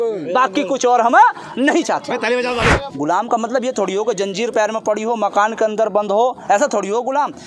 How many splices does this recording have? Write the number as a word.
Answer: one